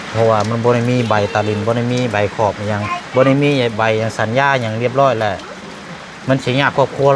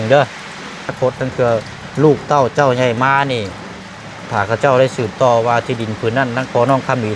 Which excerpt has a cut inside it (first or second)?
second